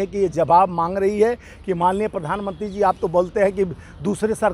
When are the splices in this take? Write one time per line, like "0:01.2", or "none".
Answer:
none